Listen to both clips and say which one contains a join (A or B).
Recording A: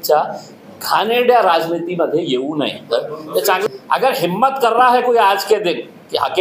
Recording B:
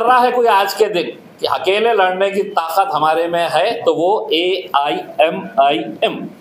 A